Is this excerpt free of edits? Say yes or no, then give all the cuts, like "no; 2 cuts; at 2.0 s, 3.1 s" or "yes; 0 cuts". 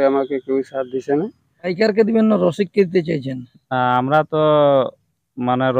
no; 1 cut; at 1.7 s